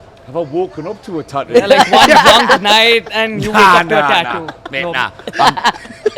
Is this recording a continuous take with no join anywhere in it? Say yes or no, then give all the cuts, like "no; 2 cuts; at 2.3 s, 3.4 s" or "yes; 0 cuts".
yes; 0 cuts